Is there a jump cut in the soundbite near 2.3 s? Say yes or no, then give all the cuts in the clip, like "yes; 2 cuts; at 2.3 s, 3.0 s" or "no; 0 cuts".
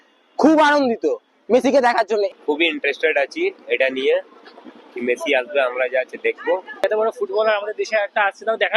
no; 0 cuts